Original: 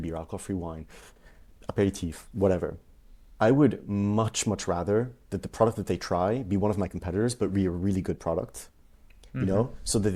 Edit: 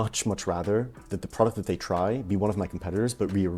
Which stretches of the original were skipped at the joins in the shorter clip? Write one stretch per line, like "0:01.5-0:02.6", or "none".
none